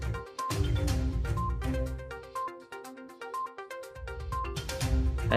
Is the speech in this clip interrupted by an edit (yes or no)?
no